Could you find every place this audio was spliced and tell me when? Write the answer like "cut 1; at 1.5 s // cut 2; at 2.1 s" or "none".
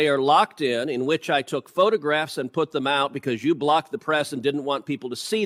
none